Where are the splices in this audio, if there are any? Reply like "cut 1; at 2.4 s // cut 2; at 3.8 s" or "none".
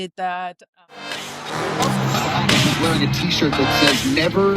cut 1; at 1.1 s

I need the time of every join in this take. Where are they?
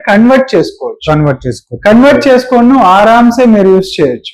none

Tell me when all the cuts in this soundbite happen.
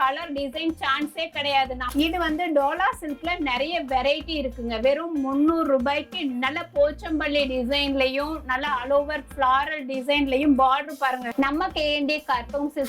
cut 1; at 1.8 s // cut 2; at 11.3 s

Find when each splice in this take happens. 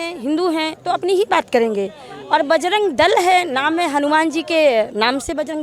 none

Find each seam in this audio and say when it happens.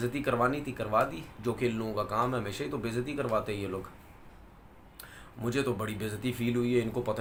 none

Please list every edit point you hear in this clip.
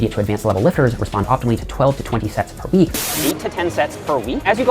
cut 1; at 3.0 s

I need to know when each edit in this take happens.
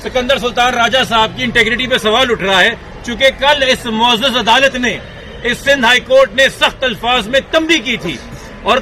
none

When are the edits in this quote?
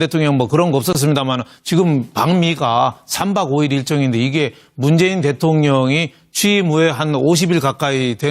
cut 1; at 3.8 s

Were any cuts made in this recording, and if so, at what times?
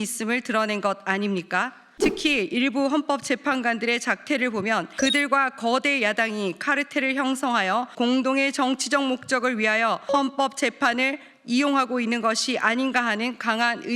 cut 1; at 1.8 s // cut 2; at 4.9 s // cut 3; at 7.9 s // cut 4; at 10.0 s

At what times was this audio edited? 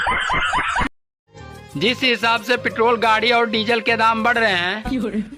cut 1; at 1.2 s

